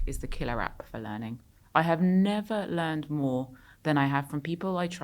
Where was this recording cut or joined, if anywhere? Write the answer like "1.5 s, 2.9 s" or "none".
none